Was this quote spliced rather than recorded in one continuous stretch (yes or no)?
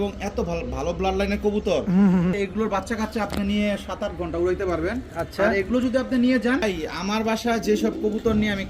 yes